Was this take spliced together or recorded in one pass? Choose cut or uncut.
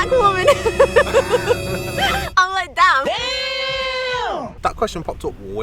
uncut